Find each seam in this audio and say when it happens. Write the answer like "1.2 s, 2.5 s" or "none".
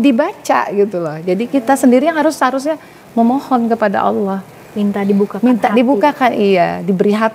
none